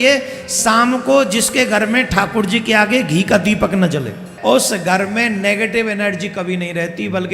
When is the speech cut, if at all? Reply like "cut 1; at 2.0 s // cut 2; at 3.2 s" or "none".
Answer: cut 1; at 4.3 s